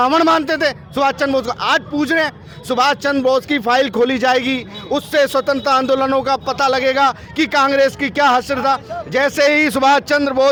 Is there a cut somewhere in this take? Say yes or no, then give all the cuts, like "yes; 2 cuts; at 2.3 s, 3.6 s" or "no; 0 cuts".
no; 0 cuts